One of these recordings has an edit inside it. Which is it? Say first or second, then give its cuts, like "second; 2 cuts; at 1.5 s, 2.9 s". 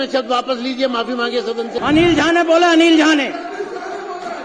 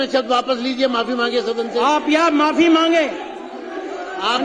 first; 1 cut; at 1.7 s